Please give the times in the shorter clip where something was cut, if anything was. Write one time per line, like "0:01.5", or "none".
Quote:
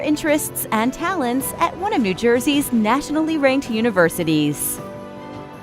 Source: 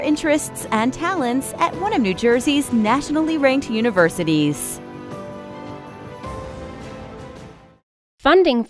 0:04.6